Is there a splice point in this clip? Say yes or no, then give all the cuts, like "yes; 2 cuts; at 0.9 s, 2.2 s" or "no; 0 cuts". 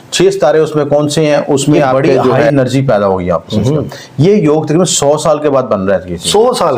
yes; 1 cut; at 2.5 s